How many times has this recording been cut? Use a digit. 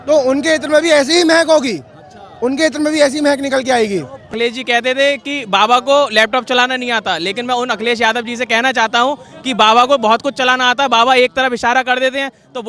1